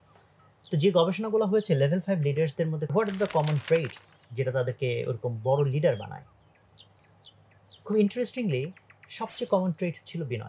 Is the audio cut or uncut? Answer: cut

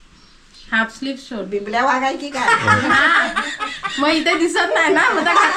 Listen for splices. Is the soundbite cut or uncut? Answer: uncut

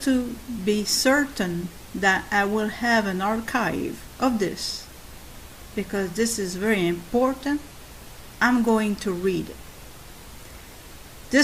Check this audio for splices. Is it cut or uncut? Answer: uncut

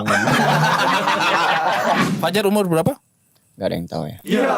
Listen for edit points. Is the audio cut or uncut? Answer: cut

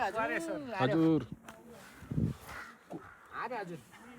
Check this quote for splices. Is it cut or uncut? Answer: uncut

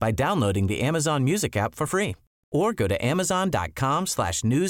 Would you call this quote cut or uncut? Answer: uncut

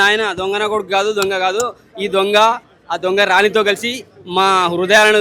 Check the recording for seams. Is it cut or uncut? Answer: uncut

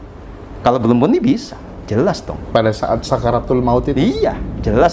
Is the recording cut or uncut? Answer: uncut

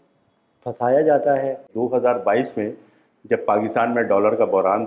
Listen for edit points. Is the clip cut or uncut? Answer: cut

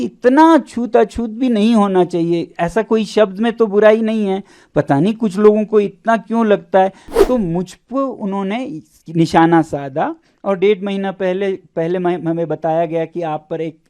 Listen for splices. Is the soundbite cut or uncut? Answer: cut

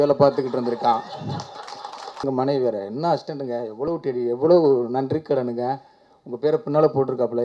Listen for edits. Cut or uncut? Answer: cut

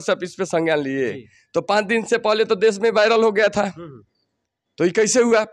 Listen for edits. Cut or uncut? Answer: uncut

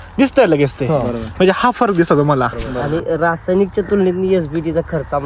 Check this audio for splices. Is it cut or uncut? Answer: cut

